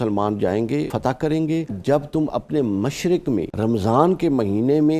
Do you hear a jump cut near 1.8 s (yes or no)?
yes